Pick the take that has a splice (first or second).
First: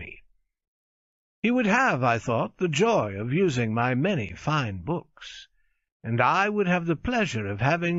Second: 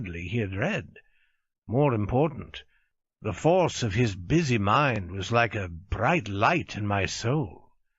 second